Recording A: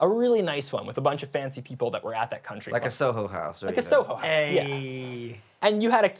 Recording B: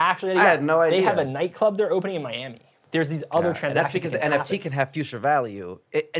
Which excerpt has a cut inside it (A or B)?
B